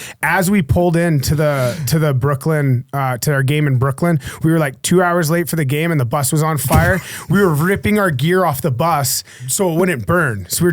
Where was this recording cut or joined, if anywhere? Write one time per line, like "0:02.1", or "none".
0:09.4